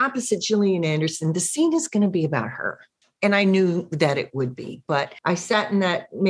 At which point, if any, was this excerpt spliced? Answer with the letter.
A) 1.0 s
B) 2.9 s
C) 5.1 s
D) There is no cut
C